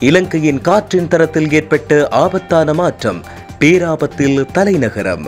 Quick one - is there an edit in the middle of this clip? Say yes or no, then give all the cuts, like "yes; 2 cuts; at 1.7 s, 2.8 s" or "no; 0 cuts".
no; 0 cuts